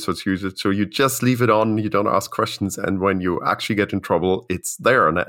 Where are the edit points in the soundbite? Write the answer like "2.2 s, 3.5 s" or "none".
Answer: none